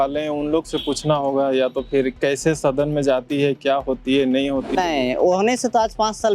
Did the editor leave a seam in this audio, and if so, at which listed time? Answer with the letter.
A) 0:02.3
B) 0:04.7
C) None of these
B